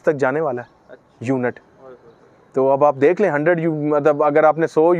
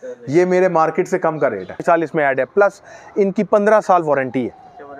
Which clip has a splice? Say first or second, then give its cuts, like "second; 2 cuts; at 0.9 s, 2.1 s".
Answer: second; 1 cut; at 1.8 s